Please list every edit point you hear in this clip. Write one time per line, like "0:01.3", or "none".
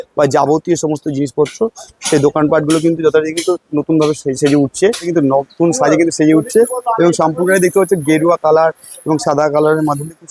0:05.1